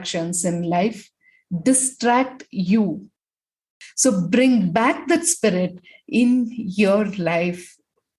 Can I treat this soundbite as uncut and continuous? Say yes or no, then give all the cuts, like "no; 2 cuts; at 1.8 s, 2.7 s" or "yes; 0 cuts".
no; 1 cut; at 3.8 s